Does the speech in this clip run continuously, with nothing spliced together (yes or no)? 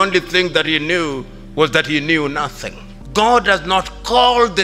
no